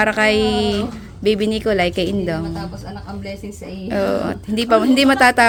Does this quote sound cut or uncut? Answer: uncut